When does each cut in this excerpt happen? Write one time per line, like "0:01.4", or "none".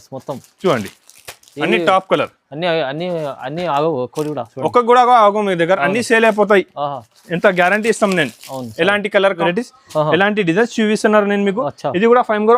0:09.4